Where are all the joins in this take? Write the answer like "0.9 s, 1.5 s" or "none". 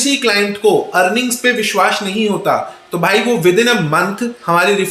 none